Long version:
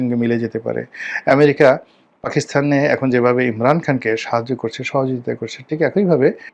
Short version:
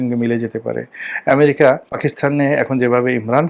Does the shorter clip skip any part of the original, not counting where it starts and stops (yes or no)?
yes